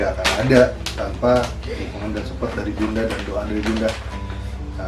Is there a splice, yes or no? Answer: no